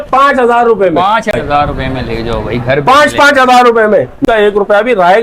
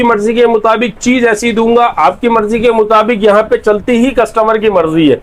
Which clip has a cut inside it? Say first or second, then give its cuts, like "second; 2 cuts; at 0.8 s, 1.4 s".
first; 2 cuts; at 1.3 s, 4.2 s